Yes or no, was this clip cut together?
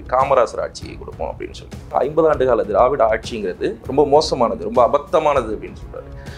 yes